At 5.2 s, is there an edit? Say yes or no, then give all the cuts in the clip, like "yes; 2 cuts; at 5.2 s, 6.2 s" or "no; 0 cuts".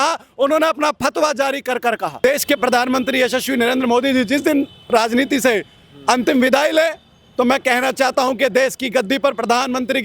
no; 1 cut; at 2.2 s